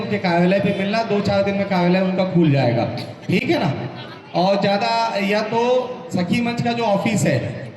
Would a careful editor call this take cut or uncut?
uncut